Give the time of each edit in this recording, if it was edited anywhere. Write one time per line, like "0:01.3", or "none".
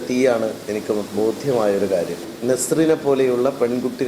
0:02.3